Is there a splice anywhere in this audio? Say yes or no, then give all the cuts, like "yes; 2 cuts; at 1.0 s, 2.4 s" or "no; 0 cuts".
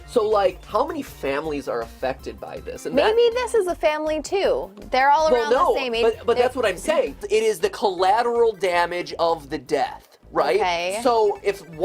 yes; 1 cut; at 7.2 s